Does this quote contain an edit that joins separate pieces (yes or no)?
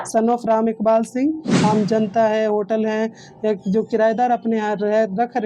yes